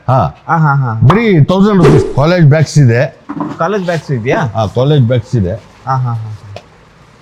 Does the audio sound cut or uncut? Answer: cut